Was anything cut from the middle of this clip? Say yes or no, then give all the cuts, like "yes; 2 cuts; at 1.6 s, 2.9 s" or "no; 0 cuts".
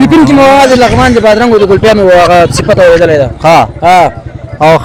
no; 0 cuts